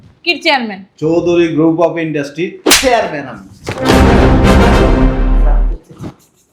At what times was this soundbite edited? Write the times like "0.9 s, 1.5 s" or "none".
none